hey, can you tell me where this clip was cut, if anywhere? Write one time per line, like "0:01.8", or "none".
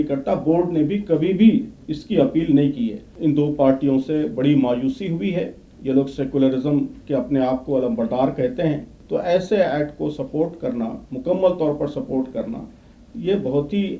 0:03.1
0:08.9